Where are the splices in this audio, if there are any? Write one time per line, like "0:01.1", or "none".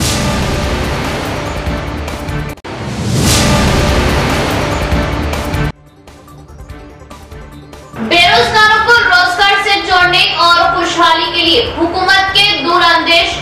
0:02.5
0:07.3

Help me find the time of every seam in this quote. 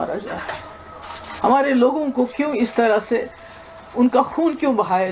none

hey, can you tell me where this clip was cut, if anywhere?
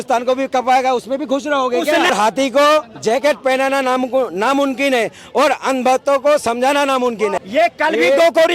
0:02.1
0:07.4

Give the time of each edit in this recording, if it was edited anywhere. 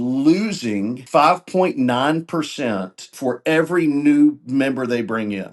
0:01.0
0:03.1

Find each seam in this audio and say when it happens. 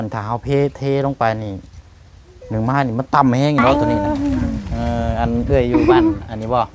0:03.7

